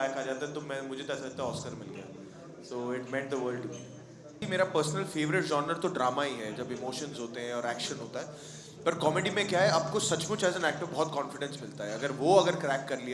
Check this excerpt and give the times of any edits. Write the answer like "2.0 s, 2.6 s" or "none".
none